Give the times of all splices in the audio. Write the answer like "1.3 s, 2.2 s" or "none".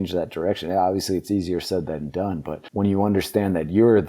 2.6 s